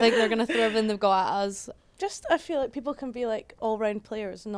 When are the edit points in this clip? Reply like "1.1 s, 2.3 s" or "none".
1.7 s